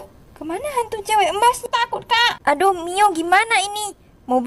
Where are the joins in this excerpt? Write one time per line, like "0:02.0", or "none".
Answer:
0:01.6